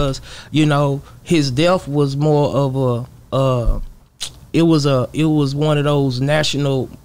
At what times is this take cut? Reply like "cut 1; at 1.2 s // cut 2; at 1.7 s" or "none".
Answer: none